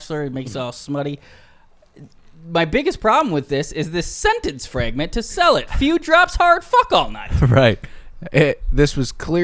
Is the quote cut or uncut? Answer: uncut